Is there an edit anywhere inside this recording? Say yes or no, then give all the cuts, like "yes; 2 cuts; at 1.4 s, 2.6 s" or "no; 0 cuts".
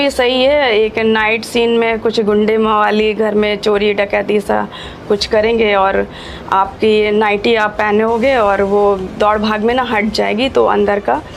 no; 0 cuts